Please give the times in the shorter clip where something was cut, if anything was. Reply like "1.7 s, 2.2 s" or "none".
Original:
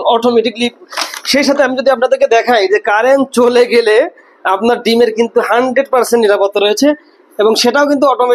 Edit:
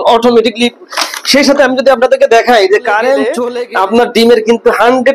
3.4 s